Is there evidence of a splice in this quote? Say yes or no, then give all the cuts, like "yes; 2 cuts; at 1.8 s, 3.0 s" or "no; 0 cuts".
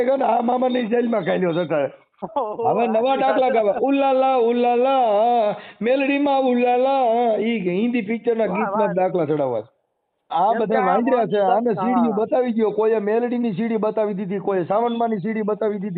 yes; 2 cuts; at 2.2 s, 10.3 s